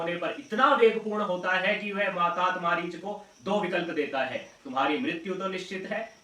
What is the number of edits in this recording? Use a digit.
0